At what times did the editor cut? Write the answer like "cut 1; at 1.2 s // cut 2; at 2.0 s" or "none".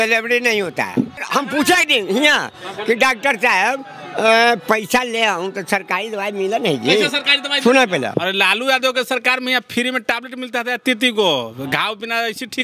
cut 1; at 1.2 s // cut 2; at 8.1 s